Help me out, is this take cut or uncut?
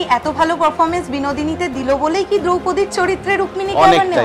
uncut